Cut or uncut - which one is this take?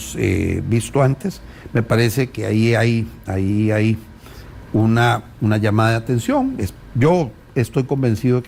uncut